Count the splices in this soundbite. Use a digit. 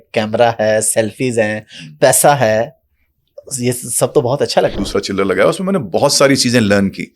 1